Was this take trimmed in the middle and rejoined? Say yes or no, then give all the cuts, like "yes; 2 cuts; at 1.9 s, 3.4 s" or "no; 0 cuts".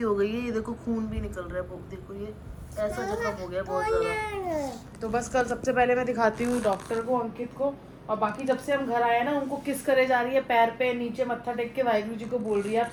no; 0 cuts